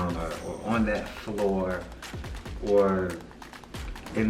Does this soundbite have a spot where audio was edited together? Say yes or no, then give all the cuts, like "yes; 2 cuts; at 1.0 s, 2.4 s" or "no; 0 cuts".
no; 0 cuts